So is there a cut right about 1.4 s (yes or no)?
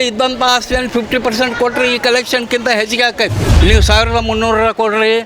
no